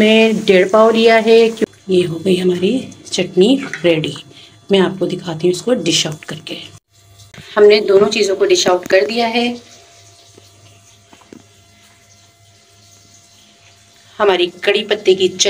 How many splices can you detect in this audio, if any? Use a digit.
2